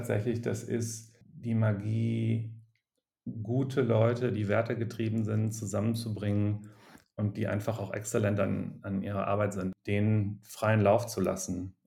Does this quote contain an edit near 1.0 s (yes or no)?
yes